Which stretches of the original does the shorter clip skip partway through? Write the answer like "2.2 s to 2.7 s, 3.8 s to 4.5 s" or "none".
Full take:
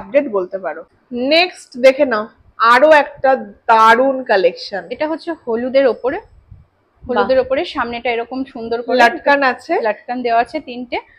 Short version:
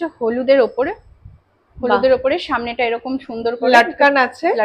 none